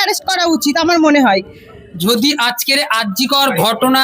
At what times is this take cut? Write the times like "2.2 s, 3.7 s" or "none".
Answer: 2.0 s

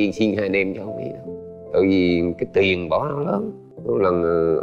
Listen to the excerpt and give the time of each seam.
3.7 s

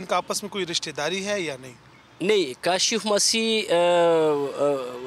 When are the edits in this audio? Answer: none

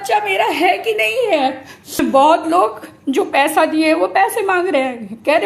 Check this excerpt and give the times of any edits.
2.0 s

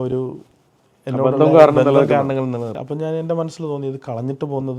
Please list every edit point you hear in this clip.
2.8 s

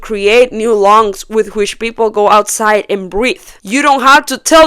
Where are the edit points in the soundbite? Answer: none

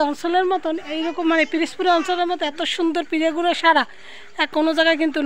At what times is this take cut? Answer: none

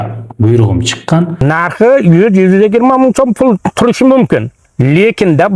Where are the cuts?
1.4 s

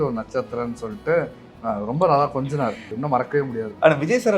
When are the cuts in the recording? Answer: 2.9 s

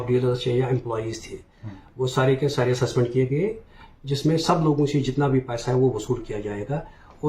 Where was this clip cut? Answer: 3.7 s

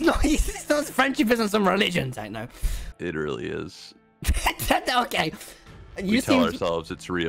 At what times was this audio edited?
none

